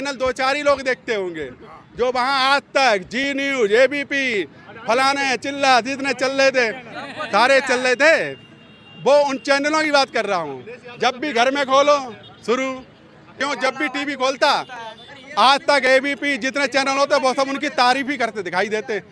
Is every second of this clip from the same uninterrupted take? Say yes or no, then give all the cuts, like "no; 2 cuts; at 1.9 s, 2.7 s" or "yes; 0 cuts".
no; 1 cut; at 13.4 s